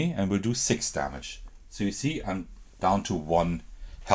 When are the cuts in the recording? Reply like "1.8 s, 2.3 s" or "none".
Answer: none